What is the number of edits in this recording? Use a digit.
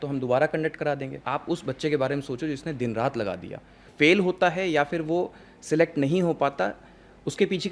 2